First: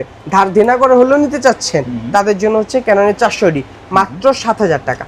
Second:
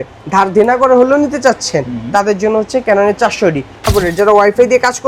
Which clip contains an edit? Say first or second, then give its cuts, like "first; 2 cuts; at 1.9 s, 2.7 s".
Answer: second; 1 cut; at 3.9 s